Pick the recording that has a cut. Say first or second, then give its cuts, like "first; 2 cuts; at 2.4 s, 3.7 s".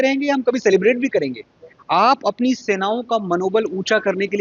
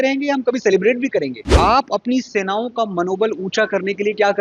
second; 1 cut; at 1.4 s